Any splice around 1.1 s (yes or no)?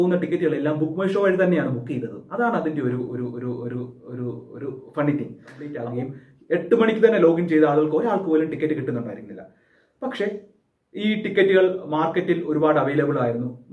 no